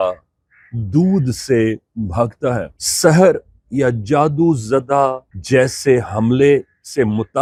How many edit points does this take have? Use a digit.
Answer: 0